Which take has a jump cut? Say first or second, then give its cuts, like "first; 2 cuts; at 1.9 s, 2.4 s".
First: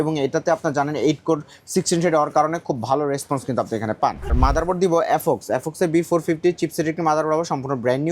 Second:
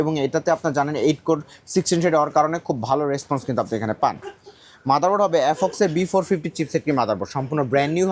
first; 1 cut; at 4.3 s